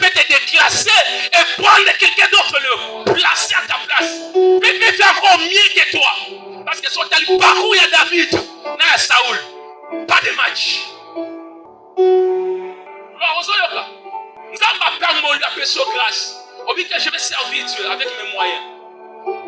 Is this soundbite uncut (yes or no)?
yes